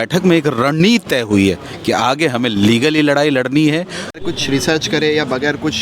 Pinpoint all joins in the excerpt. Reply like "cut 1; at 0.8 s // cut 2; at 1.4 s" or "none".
cut 1; at 4.3 s